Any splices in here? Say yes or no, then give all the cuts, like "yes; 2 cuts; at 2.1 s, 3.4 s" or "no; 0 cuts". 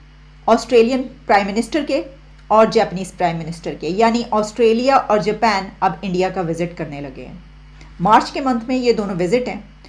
no; 0 cuts